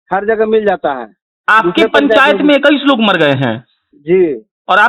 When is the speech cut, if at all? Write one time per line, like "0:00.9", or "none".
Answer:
0:01.3